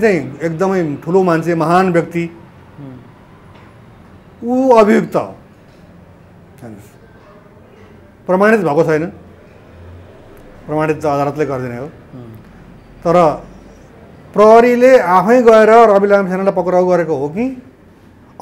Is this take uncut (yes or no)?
yes